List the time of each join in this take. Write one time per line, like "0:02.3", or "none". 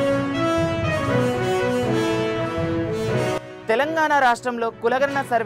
none